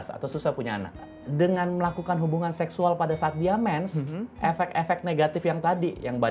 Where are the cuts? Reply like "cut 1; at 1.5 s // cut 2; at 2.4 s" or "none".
cut 1; at 1.1 s